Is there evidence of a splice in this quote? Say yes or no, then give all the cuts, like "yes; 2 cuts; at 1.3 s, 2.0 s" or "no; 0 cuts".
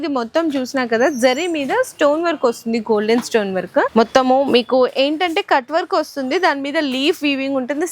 yes; 1 cut; at 3.9 s